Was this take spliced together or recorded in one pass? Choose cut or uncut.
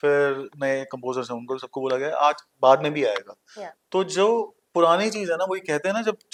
uncut